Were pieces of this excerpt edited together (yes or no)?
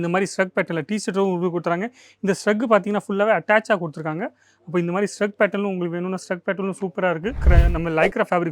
yes